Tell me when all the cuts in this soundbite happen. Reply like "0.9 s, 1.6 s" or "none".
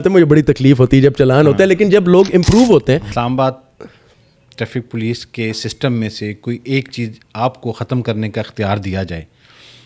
3.1 s